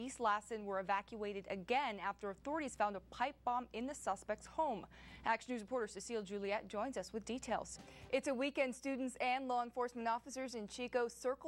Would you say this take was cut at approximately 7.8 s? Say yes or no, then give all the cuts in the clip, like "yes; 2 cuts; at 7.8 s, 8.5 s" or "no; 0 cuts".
yes; 1 cut; at 7.8 s